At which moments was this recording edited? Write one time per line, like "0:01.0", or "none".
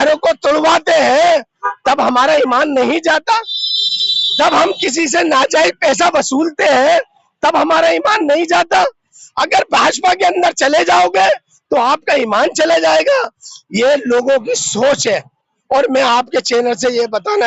none